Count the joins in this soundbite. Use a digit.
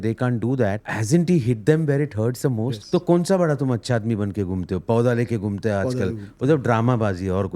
2